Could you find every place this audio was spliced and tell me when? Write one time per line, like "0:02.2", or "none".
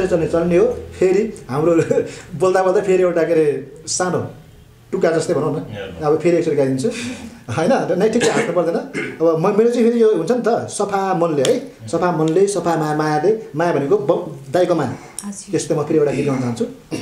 none